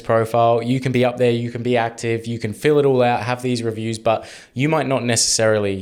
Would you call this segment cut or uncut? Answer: uncut